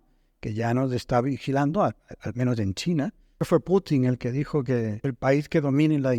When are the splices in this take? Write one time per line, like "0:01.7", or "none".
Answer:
0:03.4
0:05.0